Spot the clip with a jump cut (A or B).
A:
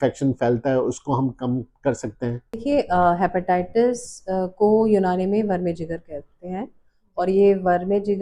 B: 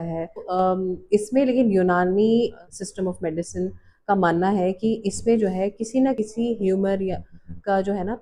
A